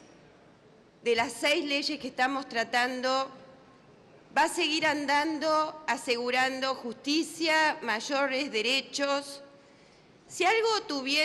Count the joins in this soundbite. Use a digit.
1